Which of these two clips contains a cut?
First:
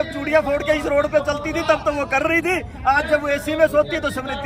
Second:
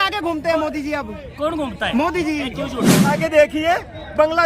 second; 1 cut; at 3.0 s

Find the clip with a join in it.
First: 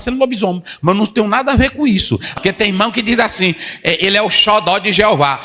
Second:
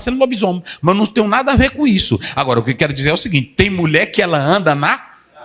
first; 1 cut; at 2.3 s

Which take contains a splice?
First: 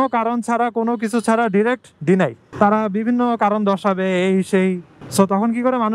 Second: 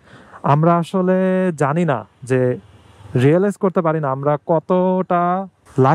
first; 1 cut; at 2.4 s

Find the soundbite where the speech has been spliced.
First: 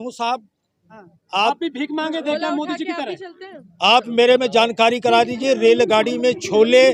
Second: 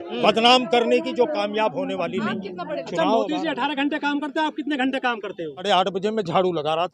second; 2 cuts; at 2.8 s, 5.6 s

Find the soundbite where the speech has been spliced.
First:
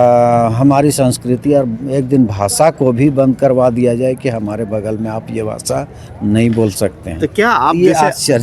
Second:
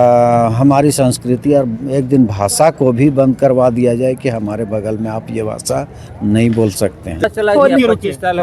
second; 1 cut; at 7.3 s

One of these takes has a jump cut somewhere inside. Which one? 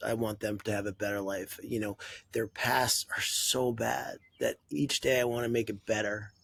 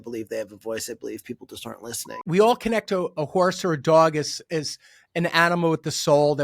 second; 1 cut; at 2.2 s

